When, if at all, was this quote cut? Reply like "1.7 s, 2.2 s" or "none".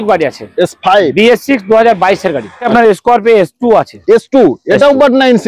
2.6 s